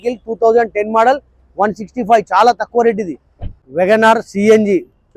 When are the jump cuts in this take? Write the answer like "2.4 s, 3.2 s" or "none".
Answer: 3.2 s